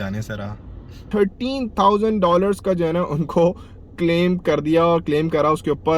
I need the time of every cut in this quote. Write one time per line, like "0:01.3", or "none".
0:01.0